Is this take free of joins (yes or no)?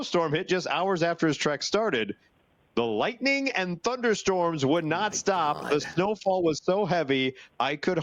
yes